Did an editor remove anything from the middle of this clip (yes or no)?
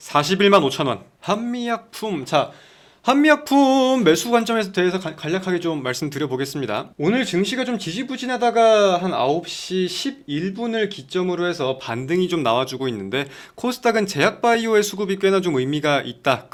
no